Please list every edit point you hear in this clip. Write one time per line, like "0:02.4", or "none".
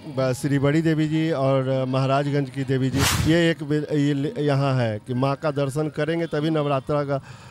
0:03.1

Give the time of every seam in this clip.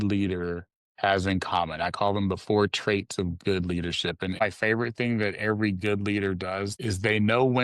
0:04.4
0:06.7

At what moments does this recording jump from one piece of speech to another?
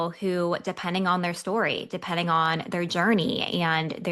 none

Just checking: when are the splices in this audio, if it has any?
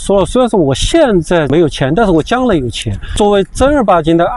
0:01.5
0:03.1

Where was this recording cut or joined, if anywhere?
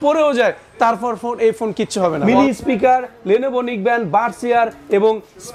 0:02.2

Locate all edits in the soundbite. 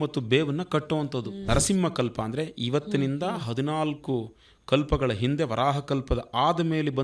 0:01.4

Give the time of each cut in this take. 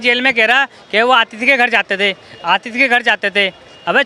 none

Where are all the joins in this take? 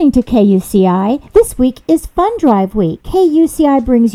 0:01.2
0:03.0

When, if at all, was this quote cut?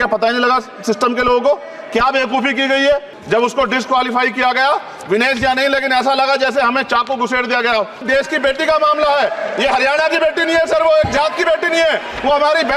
0:03.1
0:08.1

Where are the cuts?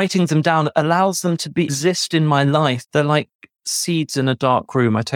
0:01.7
0:02.8

